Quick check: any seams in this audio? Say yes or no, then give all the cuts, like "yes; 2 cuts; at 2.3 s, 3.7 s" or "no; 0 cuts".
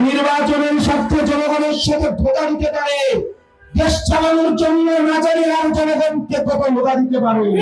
no; 0 cuts